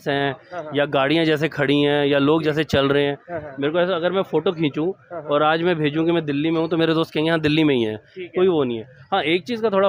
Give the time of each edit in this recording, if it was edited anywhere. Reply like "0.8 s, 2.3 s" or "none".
none